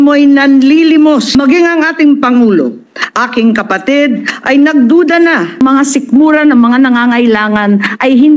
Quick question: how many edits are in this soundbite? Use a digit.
2